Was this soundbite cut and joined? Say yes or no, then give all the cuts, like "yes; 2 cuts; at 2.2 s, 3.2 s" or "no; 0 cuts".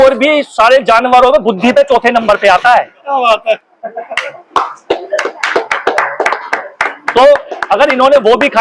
no; 0 cuts